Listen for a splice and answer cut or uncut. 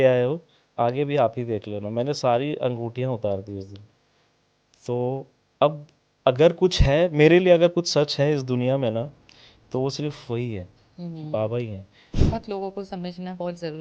cut